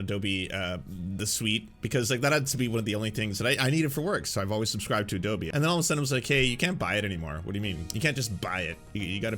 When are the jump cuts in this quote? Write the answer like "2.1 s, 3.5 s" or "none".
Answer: 5.5 s